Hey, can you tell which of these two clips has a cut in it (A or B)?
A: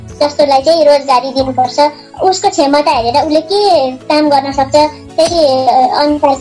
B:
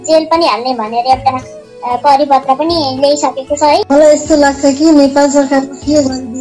B